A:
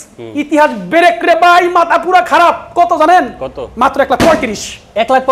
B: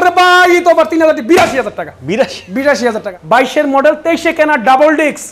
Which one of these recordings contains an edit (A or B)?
B